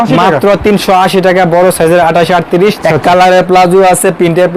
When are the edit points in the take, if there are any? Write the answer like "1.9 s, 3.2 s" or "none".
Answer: 2.8 s